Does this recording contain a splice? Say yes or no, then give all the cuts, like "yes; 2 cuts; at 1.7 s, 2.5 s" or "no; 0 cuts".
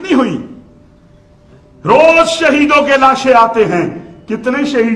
no; 0 cuts